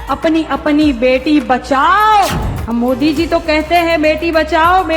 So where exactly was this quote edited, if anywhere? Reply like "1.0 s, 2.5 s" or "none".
2.5 s